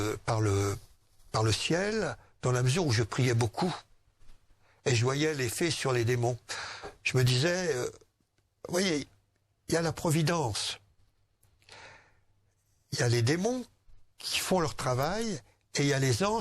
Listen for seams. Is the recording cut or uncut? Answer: uncut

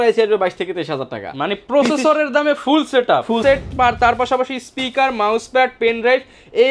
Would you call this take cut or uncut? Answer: cut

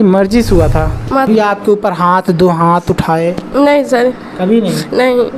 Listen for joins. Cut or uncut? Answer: cut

